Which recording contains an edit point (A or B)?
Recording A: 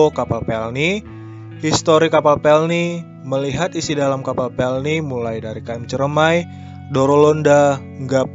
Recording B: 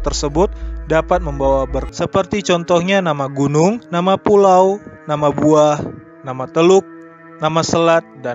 B